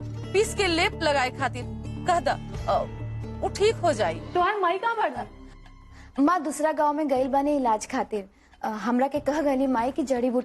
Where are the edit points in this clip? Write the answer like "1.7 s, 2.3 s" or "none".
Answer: 4.2 s